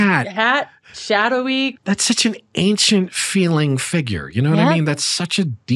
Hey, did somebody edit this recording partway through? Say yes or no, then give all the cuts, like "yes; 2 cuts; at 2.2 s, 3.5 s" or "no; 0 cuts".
yes; 1 cut; at 1.8 s